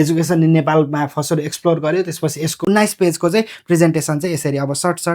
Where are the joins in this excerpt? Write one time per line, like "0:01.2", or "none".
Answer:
0:02.6